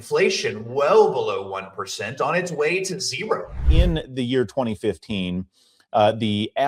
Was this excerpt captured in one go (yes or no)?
no